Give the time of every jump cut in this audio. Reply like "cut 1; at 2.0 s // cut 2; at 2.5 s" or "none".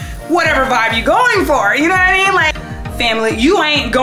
cut 1; at 2.5 s